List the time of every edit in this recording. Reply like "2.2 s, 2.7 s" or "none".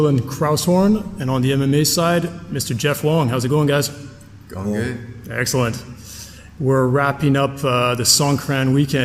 3.3 s